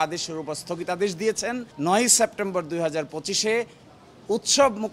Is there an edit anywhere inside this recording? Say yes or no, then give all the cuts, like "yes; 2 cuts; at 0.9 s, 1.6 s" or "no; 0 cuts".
yes; 1 cut; at 1.7 s